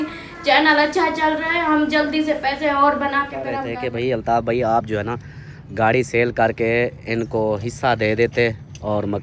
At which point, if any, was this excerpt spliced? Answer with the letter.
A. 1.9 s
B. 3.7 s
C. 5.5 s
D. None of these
B